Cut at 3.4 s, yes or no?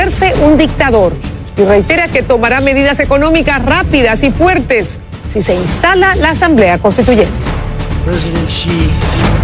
yes